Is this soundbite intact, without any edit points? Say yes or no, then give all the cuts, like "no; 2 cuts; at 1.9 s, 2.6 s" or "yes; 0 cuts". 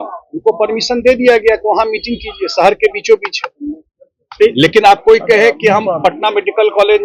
yes; 0 cuts